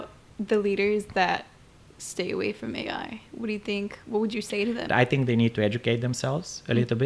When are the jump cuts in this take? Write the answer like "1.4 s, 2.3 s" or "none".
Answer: 4.9 s